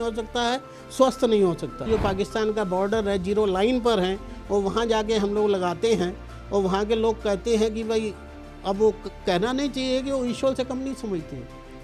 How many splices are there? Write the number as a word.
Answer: one